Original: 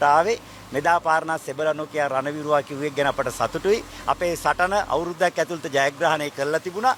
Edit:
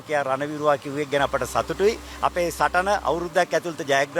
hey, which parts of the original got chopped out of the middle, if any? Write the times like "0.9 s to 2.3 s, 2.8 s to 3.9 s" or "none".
none